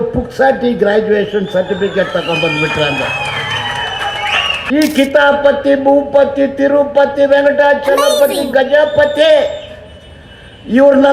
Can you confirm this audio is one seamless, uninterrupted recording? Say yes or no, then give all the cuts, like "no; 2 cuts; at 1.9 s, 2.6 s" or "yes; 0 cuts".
no; 1 cut; at 4.6 s